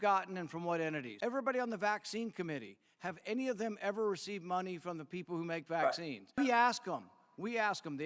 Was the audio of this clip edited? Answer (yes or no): yes